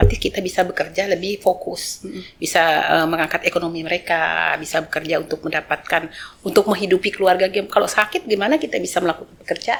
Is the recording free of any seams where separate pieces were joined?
yes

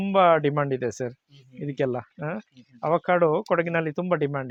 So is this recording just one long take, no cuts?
yes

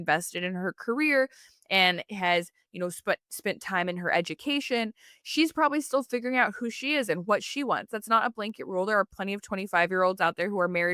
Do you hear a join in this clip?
no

